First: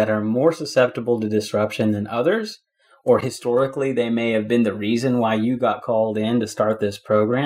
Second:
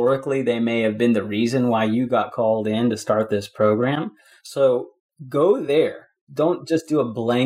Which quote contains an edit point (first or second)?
second